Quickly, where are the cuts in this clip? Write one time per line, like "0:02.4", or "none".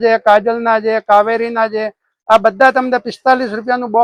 none